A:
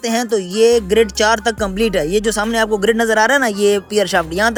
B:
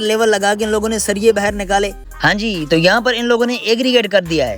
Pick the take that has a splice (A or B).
B